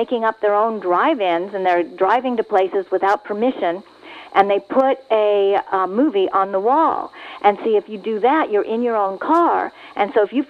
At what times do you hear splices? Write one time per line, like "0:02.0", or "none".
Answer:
none